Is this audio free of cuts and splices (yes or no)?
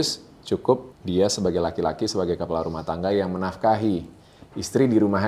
no